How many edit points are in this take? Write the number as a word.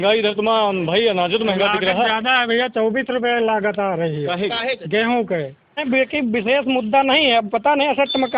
one